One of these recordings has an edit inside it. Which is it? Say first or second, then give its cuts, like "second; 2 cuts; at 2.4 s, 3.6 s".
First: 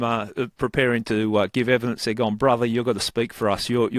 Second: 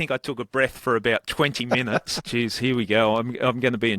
second; 1 cut; at 2.2 s